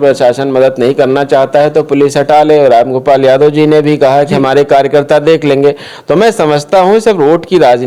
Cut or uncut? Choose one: uncut